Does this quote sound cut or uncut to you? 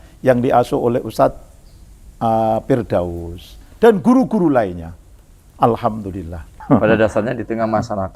cut